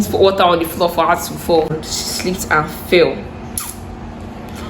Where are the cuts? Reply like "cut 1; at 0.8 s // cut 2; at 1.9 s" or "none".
cut 1; at 1.7 s